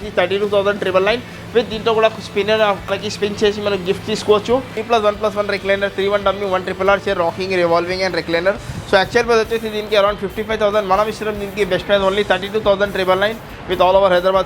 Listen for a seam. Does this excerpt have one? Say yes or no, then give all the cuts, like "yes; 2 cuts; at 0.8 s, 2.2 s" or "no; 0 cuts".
yes; 2 cuts; at 3.0 s, 4.8 s